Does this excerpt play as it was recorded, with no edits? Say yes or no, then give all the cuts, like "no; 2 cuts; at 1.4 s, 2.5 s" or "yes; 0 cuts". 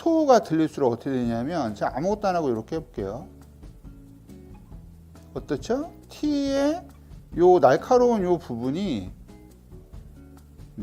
yes; 0 cuts